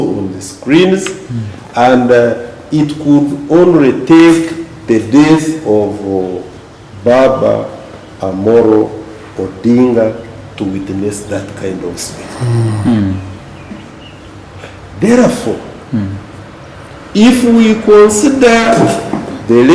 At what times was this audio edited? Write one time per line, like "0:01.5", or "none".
none